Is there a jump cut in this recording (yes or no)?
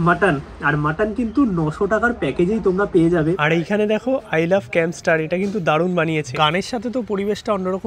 yes